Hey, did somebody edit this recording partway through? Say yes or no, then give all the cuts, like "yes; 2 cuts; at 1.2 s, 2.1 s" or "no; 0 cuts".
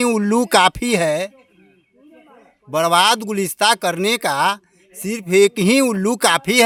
no; 0 cuts